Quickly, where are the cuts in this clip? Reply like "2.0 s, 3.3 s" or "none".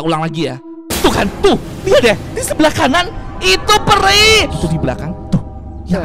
4.5 s

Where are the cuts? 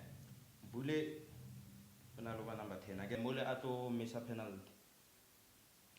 3.1 s

